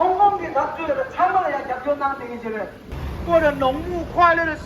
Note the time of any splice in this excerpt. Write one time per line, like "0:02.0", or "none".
0:02.8